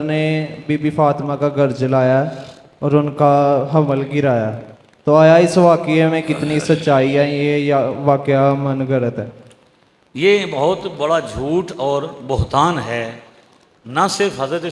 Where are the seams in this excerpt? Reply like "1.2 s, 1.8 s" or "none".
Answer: none